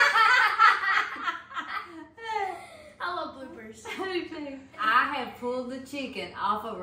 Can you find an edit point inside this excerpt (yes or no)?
yes